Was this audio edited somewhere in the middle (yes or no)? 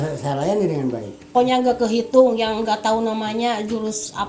yes